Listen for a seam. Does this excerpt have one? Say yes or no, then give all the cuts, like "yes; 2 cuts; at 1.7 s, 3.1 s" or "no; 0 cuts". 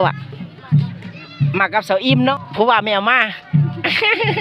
yes; 1 cut; at 2.3 s